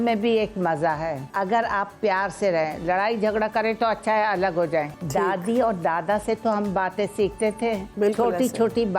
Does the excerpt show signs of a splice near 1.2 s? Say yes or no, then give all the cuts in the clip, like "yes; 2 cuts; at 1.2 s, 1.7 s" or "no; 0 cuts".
yes; 3 cuts; at 1.2 s, 5.0 s, 7.9 s